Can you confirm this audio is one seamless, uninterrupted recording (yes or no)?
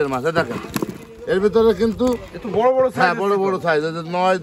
yes